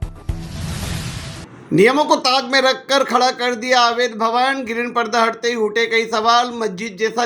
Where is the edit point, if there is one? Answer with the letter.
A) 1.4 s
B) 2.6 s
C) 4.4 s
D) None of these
A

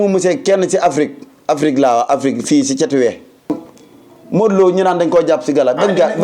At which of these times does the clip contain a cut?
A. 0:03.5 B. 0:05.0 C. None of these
A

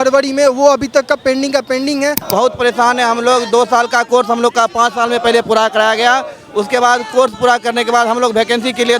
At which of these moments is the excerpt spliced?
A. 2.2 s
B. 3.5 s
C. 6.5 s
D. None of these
A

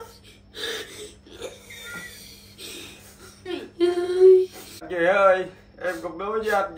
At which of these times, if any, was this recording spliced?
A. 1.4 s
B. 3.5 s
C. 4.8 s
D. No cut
C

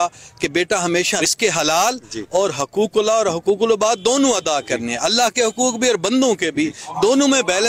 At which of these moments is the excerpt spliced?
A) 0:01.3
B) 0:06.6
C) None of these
A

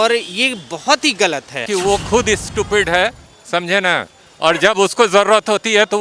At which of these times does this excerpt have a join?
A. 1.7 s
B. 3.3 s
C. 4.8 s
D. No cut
A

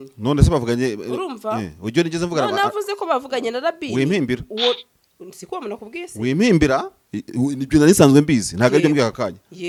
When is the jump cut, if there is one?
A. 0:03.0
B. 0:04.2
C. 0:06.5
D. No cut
D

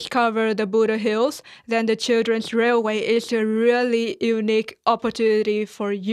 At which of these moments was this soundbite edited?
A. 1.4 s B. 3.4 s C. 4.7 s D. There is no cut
D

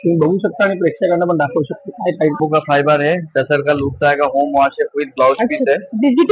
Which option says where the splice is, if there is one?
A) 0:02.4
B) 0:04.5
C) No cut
A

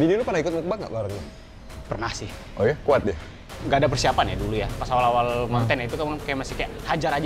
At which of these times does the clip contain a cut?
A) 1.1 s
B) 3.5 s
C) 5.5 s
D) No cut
B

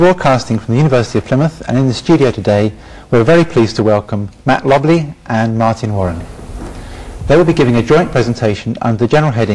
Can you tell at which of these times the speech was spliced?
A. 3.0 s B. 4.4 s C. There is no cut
C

